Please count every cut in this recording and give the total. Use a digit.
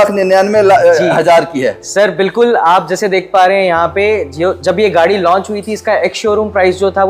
0